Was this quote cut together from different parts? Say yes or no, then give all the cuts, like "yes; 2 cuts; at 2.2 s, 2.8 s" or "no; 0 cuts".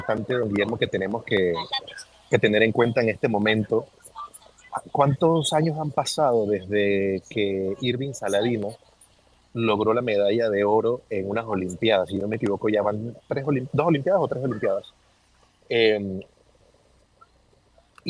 no; 0 cuts